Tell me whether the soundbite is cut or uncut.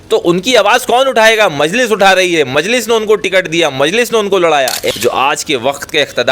cut